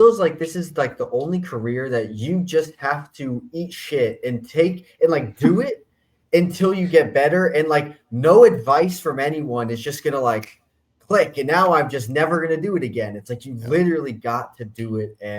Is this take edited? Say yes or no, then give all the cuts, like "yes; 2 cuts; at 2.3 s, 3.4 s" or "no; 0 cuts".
no; 0 cuts